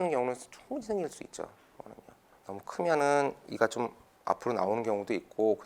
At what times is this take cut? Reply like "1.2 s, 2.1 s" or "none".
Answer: 2.4 s